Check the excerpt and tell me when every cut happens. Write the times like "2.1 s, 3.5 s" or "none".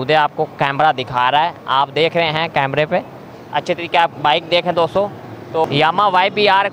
5.6 s